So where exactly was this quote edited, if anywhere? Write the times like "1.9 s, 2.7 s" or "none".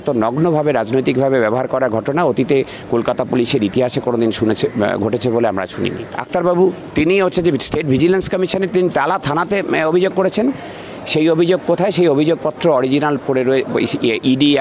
6.1 s

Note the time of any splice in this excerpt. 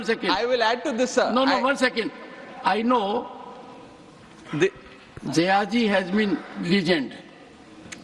none

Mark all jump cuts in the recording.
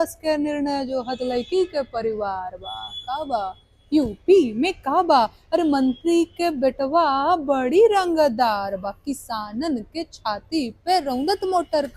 none

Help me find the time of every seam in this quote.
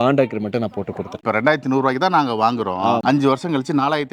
1.1 s

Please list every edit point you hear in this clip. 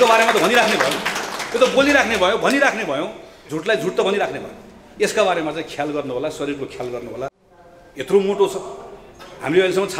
7.5 s

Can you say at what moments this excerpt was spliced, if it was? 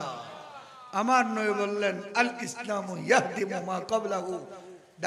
none

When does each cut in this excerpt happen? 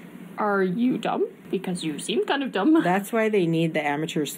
1.4 s

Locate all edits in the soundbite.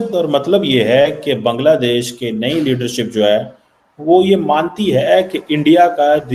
none

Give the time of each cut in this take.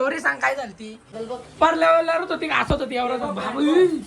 1.1 s

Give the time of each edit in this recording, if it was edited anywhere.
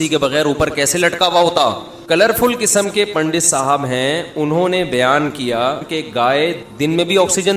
1.9 s, 5.8 s, 6.6 s

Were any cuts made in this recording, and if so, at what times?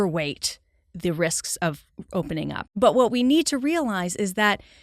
2.6 s

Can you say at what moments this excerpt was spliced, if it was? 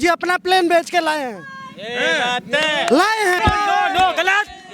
3.4 s

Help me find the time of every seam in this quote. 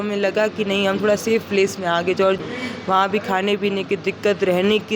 2.4 s

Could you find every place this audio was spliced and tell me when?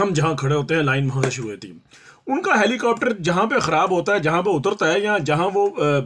none

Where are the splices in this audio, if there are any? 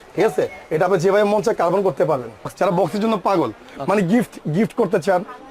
2.5 s

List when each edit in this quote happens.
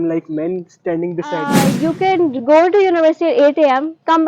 1.6 s

